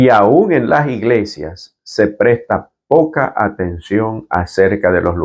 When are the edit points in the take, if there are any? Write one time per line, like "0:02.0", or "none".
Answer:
none

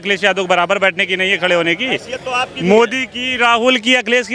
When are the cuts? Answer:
none

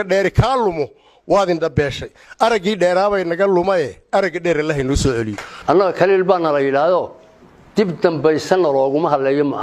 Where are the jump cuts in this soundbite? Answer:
0:05.5

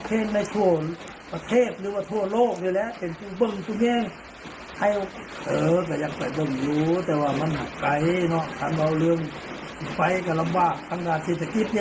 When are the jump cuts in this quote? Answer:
0:05.1

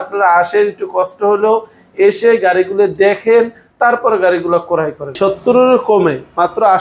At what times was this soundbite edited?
0:05.2

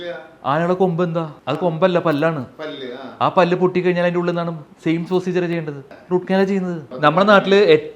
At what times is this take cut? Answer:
0:01.4
0:06.9

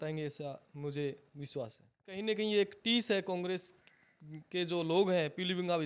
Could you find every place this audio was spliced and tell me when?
0:02.2

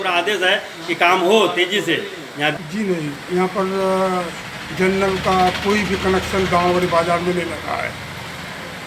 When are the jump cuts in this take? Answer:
0:02.5

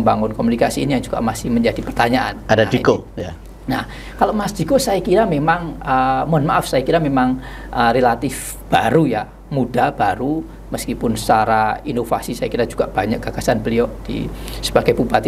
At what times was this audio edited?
none

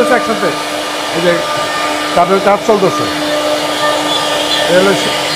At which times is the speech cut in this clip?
none

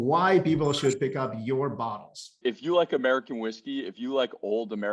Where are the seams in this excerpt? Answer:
0:02.3

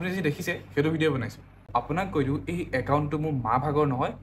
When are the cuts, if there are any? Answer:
0:01.7

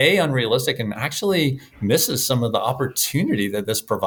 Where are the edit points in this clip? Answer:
none

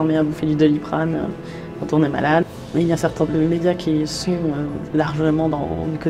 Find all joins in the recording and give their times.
0:02.4
0:04.8

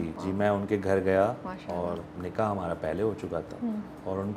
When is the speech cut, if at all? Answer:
none

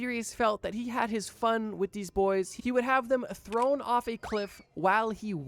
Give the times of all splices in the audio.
none

